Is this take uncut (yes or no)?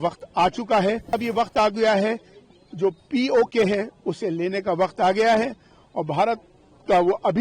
no